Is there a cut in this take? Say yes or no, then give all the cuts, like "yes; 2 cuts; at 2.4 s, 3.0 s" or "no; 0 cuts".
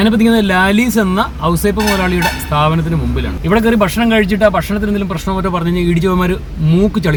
no; 0 cuts